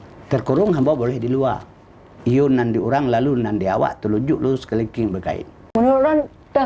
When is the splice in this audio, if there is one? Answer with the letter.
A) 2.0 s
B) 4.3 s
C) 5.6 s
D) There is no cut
C